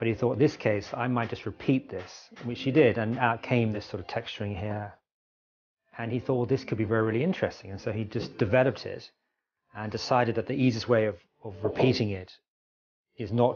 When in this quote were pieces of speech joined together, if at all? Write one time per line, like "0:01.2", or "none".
0:05.8